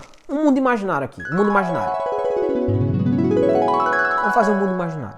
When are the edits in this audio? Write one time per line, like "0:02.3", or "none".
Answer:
none